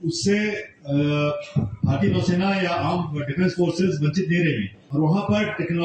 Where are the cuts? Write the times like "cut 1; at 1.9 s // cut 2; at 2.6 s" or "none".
cut 1; at 4.8 s